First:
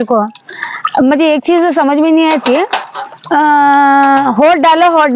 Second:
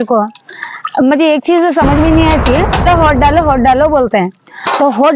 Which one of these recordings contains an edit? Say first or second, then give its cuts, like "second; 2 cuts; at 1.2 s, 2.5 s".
second; 1 cut; at 2.8 s